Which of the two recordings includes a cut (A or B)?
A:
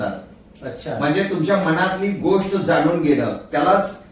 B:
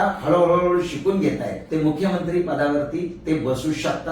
B